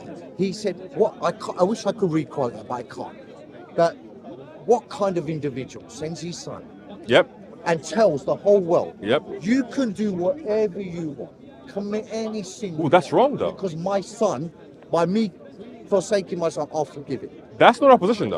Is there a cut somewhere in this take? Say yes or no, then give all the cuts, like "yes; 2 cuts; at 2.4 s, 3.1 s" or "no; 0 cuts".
no; 0 cuts